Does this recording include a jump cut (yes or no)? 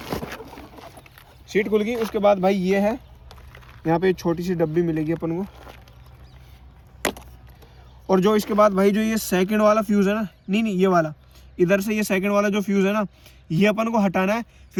no